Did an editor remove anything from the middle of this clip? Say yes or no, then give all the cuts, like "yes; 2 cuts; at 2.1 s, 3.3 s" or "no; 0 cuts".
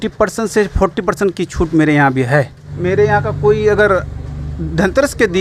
yes; 1 cut; at 2.7 s